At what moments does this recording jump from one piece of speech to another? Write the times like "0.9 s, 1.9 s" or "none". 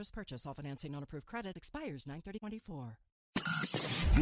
3.1 s